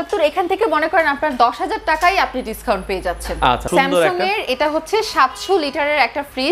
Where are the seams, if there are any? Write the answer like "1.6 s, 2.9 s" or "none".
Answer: 3.6 s